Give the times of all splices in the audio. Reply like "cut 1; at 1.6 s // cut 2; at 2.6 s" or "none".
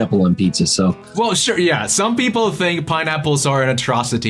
cut 1; at 1.0 s